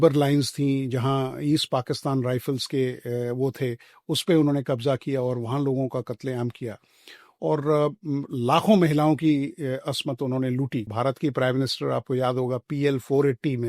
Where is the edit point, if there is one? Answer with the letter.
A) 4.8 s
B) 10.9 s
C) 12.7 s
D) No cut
B